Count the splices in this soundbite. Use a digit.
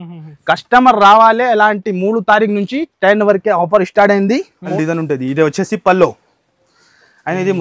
1